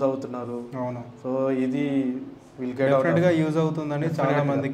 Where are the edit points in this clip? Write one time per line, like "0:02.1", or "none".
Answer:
none